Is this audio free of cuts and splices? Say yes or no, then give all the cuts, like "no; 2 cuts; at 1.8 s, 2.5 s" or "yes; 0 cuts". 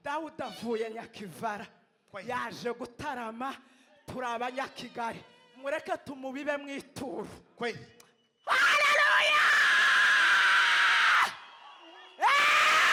yes; 0 cuts